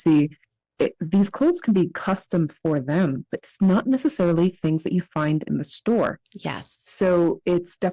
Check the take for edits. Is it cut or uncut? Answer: uncut